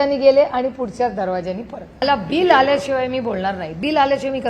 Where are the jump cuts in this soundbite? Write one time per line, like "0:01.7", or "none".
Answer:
0:02.0